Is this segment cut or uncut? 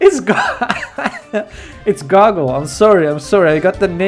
uncut